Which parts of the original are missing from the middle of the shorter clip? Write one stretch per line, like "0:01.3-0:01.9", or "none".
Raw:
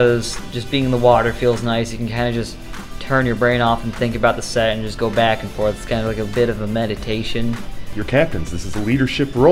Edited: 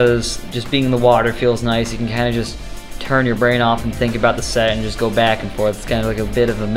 none